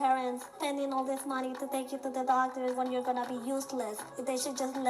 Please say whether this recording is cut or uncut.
uncut